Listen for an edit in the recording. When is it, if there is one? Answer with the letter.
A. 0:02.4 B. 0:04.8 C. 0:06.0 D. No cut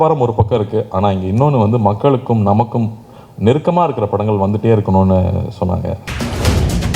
C